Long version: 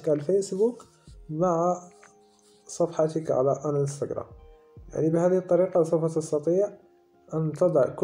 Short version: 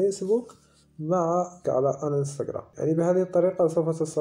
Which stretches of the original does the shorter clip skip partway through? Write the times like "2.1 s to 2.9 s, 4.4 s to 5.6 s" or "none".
1.9 s to 3.2 s, 4.3 s to 4.8 s

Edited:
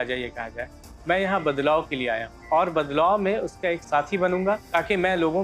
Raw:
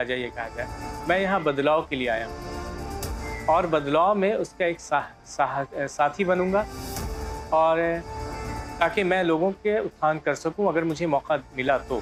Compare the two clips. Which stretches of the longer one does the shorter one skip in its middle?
2.3 s to 3.3 s, 4.8 s to 5.9 s, 6.7 s to 8.7 s

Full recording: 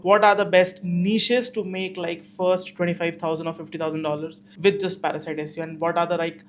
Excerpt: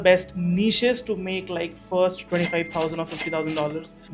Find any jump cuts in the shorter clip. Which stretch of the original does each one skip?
none

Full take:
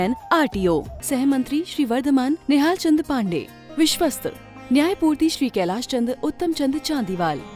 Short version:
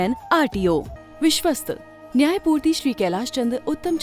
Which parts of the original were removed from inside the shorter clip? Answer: 1.0 s to 3.5 s

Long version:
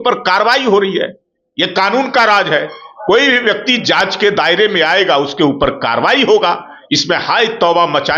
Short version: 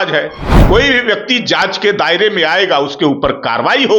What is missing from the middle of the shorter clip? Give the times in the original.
none

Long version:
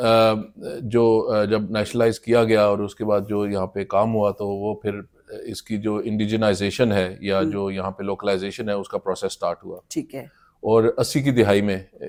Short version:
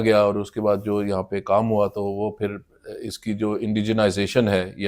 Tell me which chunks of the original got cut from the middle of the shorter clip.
none

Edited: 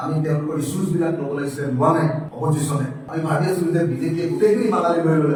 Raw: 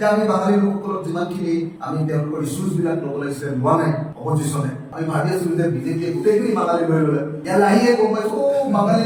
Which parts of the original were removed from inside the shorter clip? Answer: none

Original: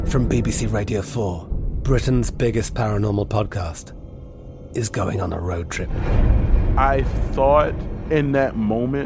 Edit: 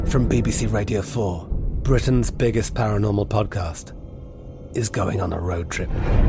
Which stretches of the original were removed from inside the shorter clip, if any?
none

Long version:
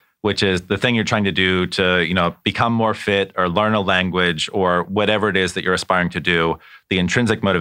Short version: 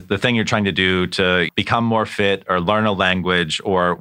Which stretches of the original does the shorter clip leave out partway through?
2.1 s to 2.4 s

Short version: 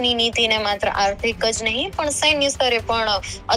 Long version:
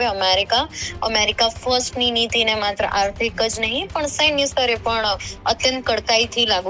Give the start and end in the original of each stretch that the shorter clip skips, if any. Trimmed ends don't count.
none

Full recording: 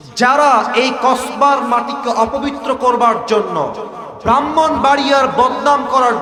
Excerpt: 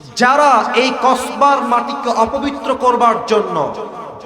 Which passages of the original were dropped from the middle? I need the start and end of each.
none

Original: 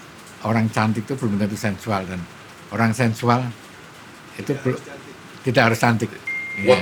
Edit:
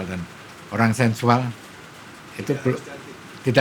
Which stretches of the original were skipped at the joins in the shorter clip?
none

